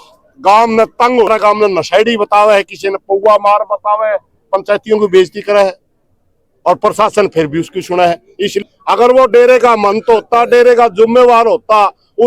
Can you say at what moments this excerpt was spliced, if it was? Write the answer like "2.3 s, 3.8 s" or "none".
1.3 s, 8.5 s